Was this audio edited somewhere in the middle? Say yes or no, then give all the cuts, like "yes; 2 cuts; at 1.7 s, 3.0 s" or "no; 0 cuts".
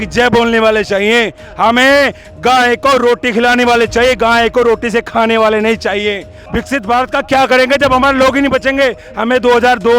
yes; 1 cut; at 6.4 s